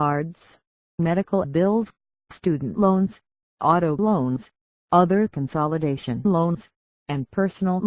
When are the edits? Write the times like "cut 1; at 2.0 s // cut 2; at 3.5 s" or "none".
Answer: none